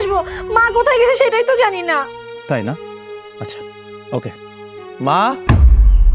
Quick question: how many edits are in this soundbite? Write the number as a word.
zero